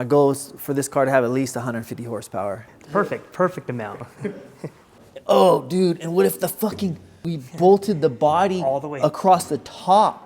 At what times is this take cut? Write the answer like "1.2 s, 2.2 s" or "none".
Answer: 2.7 s, 4.9 s, 7.3 s